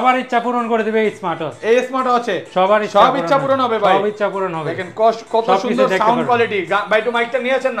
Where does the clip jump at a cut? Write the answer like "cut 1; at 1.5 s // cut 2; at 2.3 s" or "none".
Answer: none